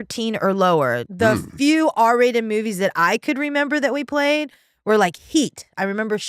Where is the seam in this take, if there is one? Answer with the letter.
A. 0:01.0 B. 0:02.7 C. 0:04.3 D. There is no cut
A